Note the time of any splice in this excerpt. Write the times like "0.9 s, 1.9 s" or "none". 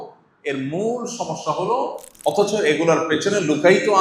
2.0 s